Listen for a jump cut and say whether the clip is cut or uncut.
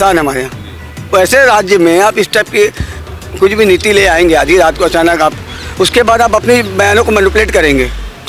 uncut